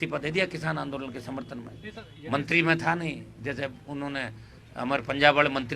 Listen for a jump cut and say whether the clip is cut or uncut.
uncut